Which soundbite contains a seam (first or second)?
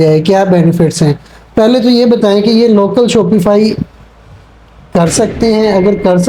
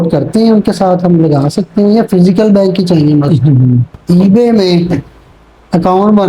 second